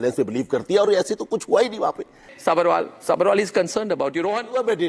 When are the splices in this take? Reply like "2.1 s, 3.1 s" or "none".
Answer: 2.1 s